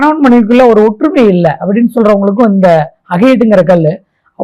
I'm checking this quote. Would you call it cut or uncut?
uncut